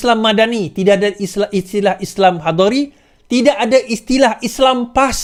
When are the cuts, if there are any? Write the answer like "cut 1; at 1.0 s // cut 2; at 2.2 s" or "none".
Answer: none